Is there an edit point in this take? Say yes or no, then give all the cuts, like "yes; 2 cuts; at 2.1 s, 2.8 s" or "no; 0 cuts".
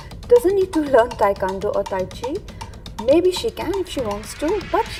no; 0 cuts